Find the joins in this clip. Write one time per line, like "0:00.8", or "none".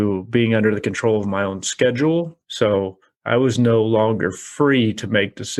0:02.4